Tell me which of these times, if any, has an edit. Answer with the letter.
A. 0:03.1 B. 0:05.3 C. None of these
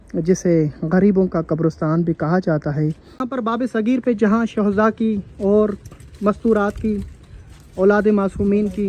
A